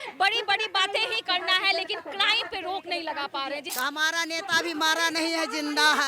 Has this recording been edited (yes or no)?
yes